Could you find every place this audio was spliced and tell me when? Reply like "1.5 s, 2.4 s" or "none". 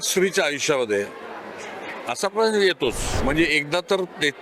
3.1 s